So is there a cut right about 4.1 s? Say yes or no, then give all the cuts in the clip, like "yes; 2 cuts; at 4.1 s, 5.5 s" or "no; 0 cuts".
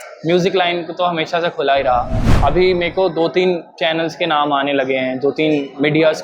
no; 1 cut; at 2.2 s